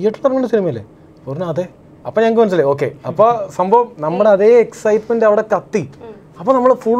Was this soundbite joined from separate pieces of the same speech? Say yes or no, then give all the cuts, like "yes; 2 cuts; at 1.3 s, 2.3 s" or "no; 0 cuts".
no; 0 cuts